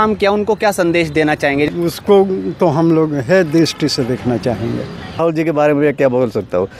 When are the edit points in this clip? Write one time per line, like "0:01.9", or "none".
0:01.7
0:05.2